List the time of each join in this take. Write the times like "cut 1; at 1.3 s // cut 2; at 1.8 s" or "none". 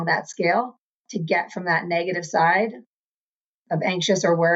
none

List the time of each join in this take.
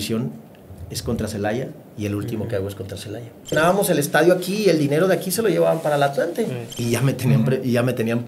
cut 1; at 3.5 s // cut 2; at 6.7 s

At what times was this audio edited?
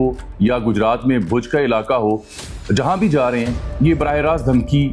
none

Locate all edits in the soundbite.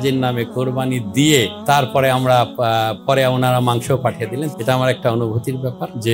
cut 1; at 4.5 s

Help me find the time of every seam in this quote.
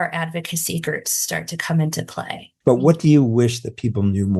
cut 1; at 2.5 s

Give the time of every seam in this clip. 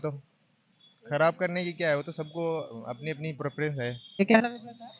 cut 1; at 4.0 s

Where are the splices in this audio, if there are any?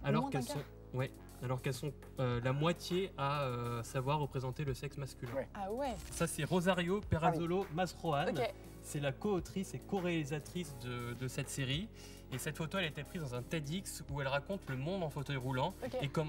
cut 1; at 6.1 s

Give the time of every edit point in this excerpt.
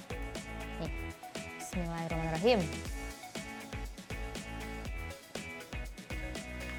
none

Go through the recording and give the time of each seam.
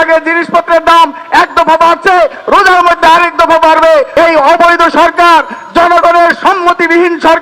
cut 1; at 4.1 s

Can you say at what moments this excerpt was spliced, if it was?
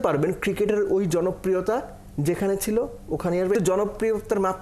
cut 1; at 3.5 s

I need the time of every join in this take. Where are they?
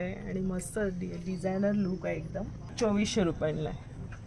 cut 1; at 2.6 s

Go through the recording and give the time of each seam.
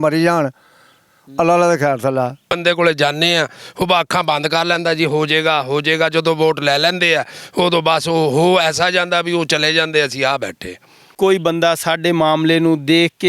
cut 1; at 2.5 s // cut 2; at 11.1 s

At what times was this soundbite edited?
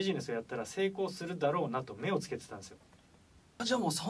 none

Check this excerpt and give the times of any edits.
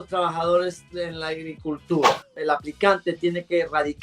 cut 1; at 2.3 s

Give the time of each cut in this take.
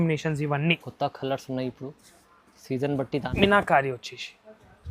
cut 1; at 3.3 s

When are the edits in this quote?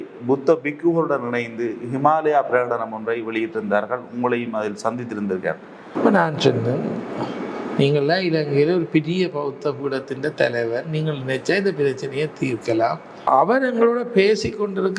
cut 1; at 5.9 s // cut 2; at 13.3 s

